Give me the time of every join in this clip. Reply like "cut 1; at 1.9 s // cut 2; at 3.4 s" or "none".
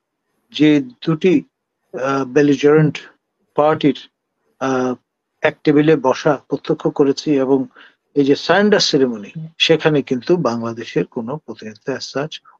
none